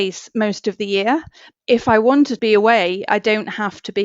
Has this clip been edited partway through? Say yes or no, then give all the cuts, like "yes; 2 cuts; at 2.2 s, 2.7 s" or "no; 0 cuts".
yes; 2 cuts; at 1.5 s, 2.4 s